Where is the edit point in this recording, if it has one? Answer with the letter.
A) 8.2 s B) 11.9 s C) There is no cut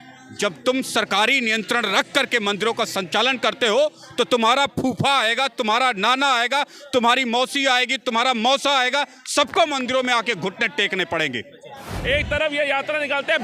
B